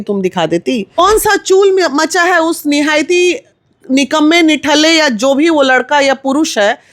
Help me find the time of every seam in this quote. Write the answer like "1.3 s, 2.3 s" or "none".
0.9 s